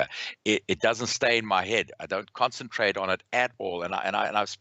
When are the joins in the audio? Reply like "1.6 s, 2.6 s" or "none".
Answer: none